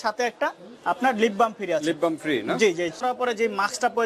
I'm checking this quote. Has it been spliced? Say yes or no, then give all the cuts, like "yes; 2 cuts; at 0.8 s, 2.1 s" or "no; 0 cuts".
yes; 1 cut; at 3.0 s